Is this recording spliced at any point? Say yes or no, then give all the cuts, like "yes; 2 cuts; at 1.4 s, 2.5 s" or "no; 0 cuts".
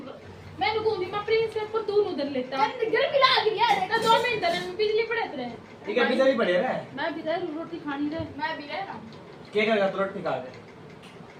no; 0 cuts